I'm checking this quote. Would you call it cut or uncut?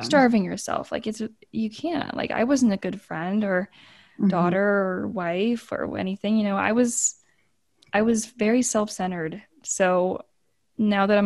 uncut